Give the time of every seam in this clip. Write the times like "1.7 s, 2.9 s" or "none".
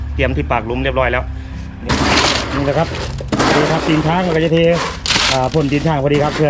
1.9 s

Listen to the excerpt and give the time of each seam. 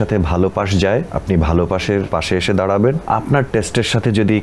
1.1 s, 2.1 s, 3.0 s

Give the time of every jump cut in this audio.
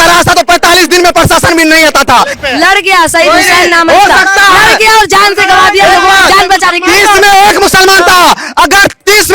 2.4 s

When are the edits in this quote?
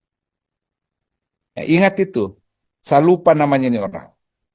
none

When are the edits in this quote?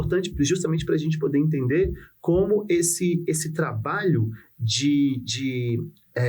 none

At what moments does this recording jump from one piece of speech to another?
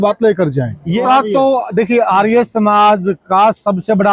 1.0 s

